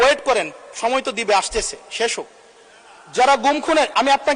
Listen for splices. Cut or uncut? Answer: uncut